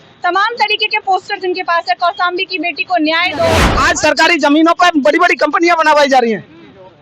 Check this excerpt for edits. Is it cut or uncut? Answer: cut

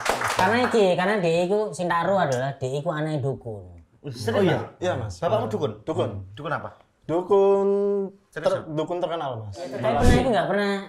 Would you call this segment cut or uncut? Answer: cut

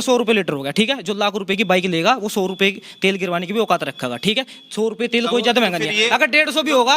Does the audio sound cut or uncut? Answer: uncut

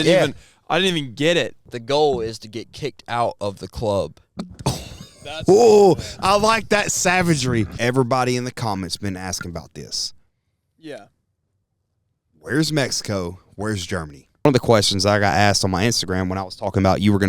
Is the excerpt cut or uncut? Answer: cut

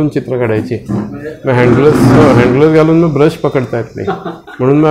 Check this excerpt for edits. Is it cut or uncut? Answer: uncut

